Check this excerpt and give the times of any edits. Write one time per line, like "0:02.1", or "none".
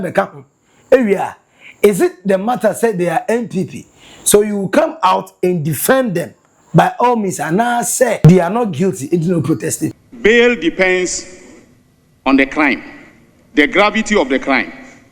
0:08.2
0:10.0